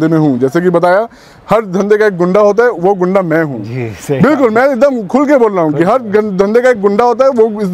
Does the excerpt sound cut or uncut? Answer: uncut